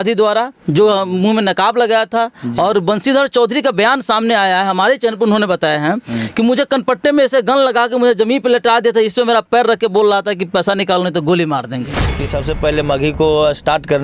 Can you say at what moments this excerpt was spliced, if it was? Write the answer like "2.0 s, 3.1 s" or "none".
12.1 s